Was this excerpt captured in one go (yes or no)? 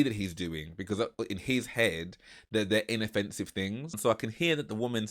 no